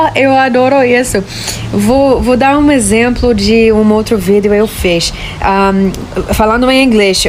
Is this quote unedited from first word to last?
yes; 0 cuts

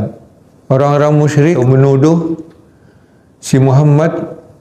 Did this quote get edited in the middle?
yes; 1 cut; at 1.6 s

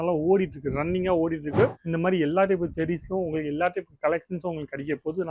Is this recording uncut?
no; 1 cut; at 1.8 s

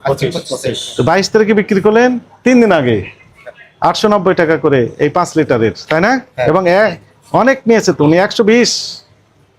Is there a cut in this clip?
no; 0 cuts

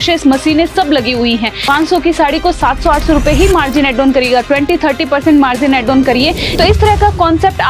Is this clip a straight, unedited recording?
no; 2 cuts; at 1.5 s, 6.4 s

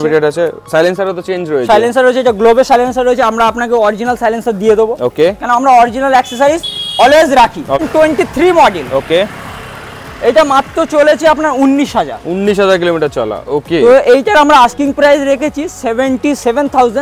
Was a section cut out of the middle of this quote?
yes; 1 cut; at 7.8 s

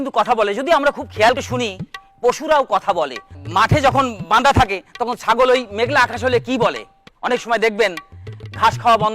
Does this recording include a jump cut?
yes; 1 cut; at 1.4 s

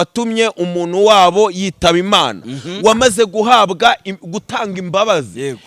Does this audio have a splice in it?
no; 0 cuts

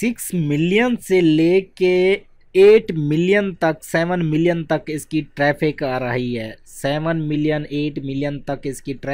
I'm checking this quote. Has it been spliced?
yes; 1 cut; at 2.3 s

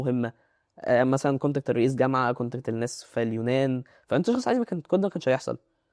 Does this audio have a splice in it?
no; 0 cuts

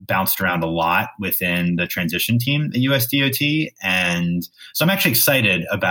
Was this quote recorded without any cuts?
no; 1 cut; at 4.6 s

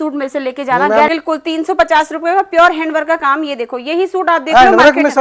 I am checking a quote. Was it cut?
yes; 1 cut; at 1.1 s

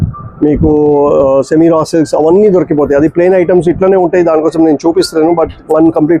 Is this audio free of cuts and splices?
yes; 0 cuts

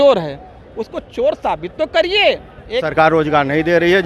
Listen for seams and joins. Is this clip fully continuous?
no; 1 cut; at 2.8 s

